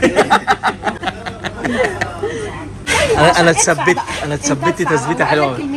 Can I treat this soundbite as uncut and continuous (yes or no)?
yes